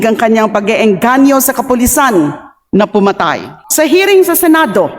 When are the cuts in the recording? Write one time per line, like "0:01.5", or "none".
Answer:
0:03.5